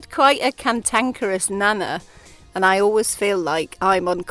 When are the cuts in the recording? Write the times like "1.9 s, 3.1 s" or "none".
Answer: none

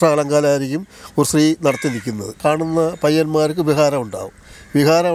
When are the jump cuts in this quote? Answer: 2.4 s

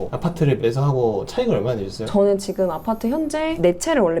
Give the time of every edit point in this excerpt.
2.0 s

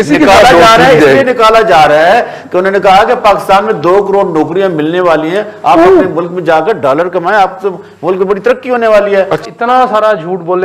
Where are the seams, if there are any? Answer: 9.4 s

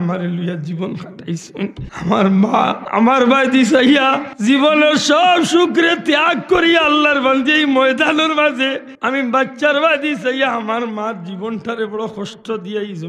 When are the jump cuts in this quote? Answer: 1.9 s, 2.8 s, 4.3 s, 8.9 s

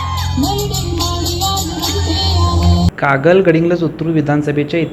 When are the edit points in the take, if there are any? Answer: 2.9 s

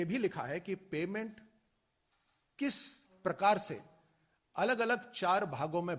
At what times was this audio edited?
none

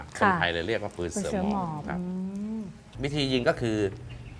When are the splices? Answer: 2.9 s

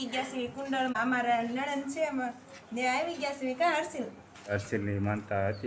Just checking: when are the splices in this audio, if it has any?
4.5 s

